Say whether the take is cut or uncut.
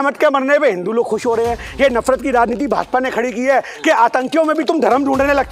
uncut